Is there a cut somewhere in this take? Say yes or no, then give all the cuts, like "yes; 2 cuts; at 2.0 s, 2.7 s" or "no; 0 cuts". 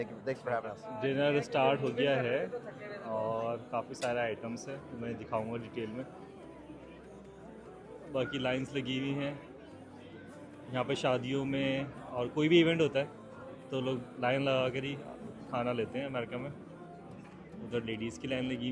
no; 0 cuts